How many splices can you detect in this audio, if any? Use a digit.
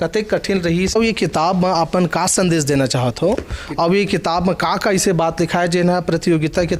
1